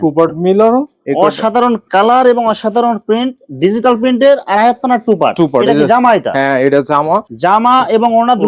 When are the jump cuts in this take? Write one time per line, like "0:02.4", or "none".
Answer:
0:01.0
0:07.3